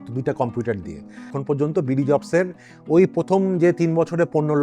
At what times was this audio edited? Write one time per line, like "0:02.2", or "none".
0:01.3